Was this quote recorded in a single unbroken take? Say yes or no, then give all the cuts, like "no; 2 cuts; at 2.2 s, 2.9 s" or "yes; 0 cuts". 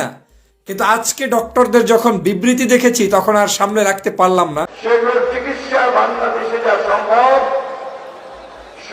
no; 1 cut; at 4.7 s